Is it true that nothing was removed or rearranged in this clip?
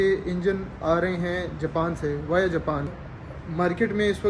no; 1 cut; at 2.9 s

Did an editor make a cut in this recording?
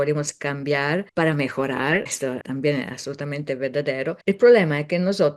yes; 3 cuts; at 1.1 s, 2.3 s, 4.2 s

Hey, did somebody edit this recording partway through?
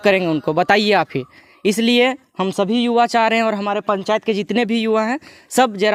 no; 0 cuts

